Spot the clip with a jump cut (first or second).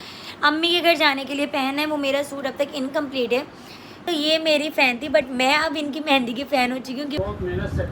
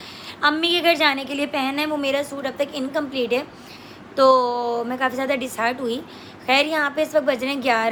first